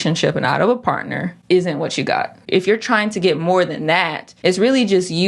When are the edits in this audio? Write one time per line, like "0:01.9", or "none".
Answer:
0:01.3
0:02.4
0:04.2